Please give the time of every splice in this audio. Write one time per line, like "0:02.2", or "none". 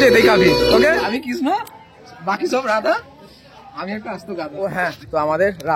0:01.1
0:04.9